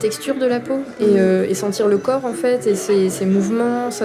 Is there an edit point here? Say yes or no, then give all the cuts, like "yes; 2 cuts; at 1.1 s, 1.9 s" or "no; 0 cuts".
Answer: no; 0 cuts